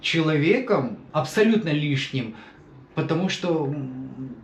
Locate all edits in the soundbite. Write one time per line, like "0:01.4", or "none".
0:01.0